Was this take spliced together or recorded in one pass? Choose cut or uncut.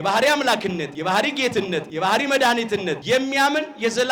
cut